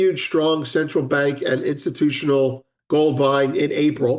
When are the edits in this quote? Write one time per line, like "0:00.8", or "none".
0:02.7